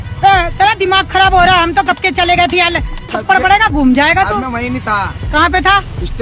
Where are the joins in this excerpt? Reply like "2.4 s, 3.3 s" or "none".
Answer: none